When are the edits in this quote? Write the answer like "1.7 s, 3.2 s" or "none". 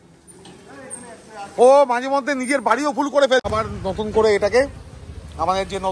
3.5 s